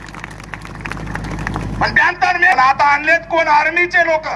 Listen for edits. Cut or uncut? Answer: cut